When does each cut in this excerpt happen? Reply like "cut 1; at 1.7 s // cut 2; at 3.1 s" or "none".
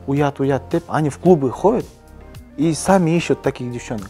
none